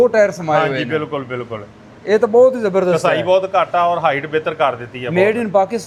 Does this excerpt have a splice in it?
no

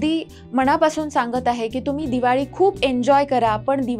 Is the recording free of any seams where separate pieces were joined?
yes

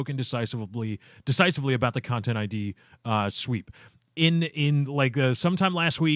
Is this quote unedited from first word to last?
no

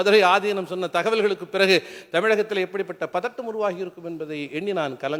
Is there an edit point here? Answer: no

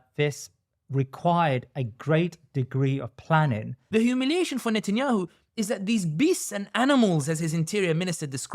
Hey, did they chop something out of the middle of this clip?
yes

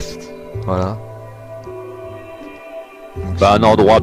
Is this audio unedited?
no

